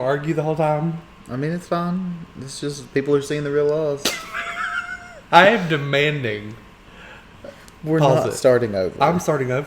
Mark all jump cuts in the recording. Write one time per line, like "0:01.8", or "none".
0:05.1

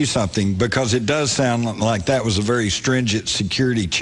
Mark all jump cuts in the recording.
none

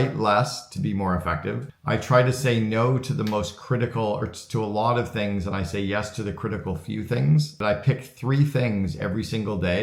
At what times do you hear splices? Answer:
0:01.7
0:07.6

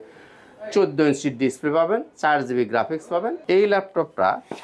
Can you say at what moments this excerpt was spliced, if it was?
0:03.4

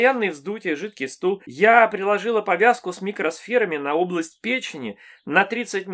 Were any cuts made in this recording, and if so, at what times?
0:01.5

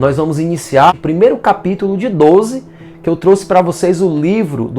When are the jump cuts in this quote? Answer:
0:00.9

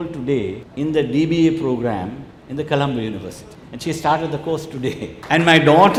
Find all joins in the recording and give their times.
none

